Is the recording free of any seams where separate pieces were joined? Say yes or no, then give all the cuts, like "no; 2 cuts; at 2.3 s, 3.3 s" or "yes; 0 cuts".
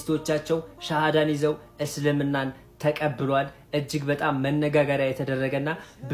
yes; 0 cuts